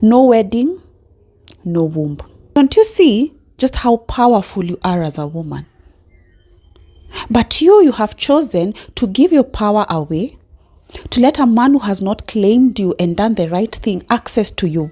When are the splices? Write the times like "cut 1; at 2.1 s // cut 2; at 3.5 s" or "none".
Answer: cut 1; at 2.6 s